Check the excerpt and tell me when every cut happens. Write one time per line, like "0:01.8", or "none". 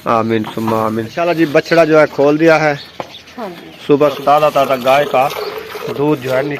0:01.2
0:04.2